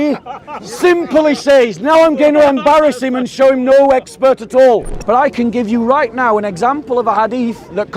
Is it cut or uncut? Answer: cut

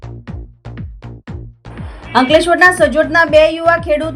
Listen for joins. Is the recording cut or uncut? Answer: cut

